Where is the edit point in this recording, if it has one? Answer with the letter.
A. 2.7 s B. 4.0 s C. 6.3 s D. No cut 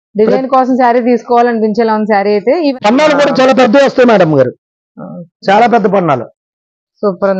A